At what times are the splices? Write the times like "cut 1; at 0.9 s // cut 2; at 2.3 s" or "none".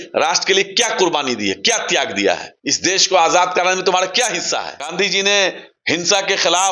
cut 1; at 2.5 s // cut 2; at 4.8 s // cut 3; at 5.7 s